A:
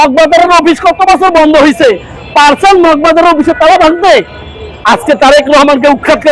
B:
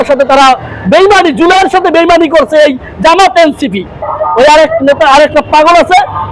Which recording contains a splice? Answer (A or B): B